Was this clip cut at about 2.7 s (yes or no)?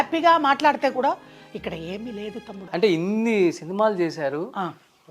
yes